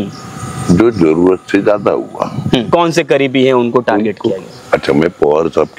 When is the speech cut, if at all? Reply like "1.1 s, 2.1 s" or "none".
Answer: 2.7 s

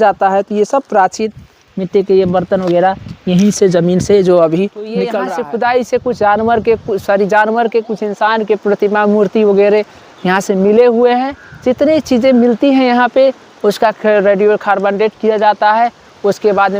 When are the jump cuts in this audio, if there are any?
5.2 s

